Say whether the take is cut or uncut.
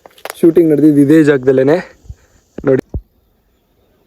cut